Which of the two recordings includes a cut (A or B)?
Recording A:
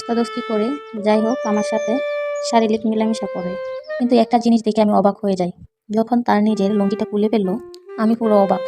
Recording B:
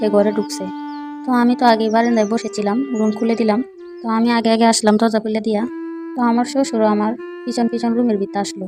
A